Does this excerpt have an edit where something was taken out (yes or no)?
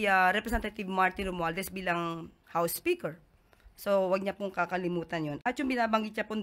no